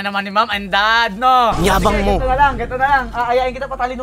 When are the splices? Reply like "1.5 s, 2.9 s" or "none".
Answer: 1.6 s